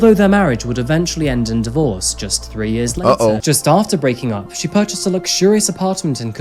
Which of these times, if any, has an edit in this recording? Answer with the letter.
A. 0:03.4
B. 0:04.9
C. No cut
A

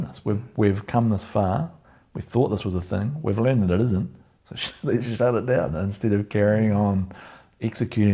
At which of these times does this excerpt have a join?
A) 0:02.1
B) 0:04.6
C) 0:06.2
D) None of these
D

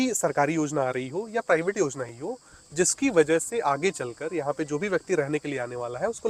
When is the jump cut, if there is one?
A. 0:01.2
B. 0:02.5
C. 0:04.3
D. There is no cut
D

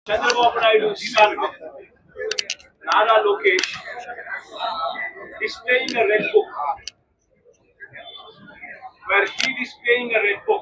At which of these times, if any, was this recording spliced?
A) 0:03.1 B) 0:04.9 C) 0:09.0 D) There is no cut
D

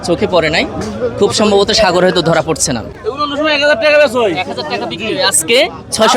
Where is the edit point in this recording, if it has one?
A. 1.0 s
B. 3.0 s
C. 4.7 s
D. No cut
B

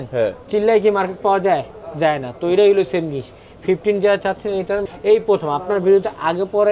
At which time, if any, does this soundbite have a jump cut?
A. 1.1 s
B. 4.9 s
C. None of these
B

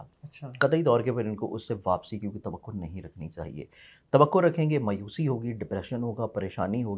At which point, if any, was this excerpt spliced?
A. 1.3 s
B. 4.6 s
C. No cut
C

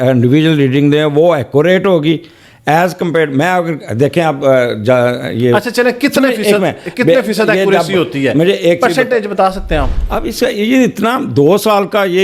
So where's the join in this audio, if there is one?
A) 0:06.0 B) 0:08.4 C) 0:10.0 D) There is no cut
C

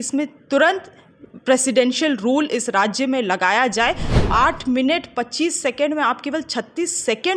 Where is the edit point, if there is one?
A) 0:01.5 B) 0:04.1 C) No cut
B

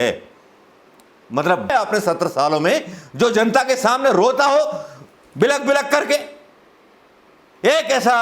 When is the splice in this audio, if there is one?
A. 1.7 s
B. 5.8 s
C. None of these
A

